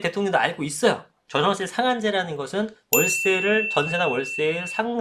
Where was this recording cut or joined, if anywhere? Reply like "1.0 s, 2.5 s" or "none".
1.2 s